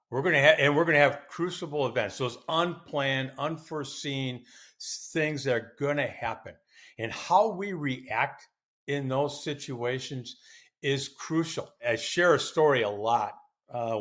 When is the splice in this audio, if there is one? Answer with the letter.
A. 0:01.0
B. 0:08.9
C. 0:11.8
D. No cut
C